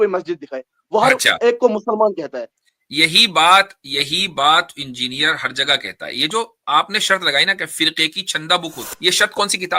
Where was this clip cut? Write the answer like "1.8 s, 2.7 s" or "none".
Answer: 8.9 s